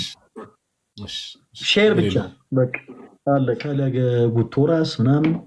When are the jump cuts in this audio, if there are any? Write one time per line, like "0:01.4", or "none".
0:03.7